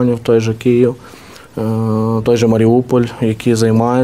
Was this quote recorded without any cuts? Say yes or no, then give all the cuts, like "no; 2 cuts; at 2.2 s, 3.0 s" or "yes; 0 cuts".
yes; 0 cuts